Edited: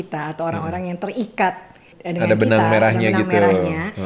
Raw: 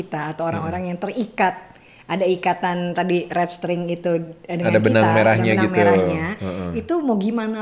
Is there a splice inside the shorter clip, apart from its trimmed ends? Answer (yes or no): yes